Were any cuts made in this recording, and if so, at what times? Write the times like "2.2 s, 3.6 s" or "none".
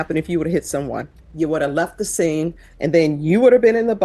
1.2 s, 2.7 s